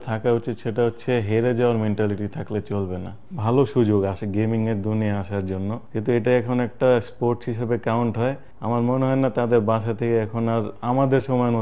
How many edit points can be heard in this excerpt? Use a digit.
3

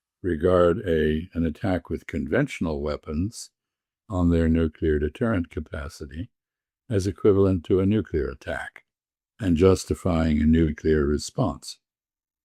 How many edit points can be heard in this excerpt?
0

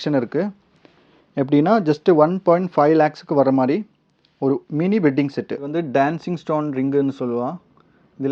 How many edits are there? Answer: 1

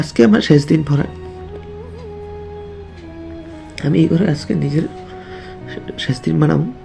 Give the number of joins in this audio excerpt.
2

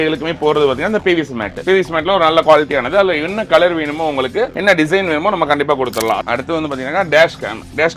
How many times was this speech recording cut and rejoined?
1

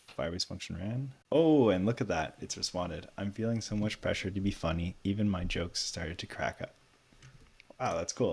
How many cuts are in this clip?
1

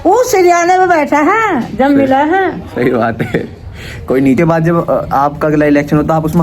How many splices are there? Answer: 1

